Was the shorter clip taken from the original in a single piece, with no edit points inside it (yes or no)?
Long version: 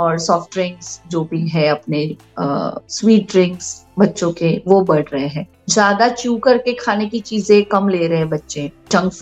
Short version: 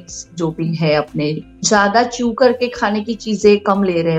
no